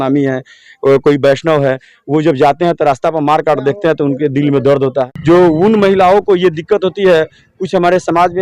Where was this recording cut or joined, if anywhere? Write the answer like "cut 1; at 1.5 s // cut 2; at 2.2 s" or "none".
cut 1; at 5.1 s